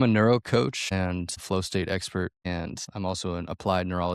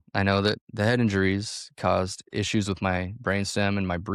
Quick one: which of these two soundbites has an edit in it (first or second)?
first